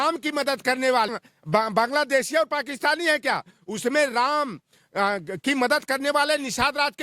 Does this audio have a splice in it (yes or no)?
yes